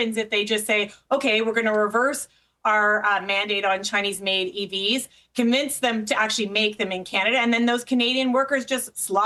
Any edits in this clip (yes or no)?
no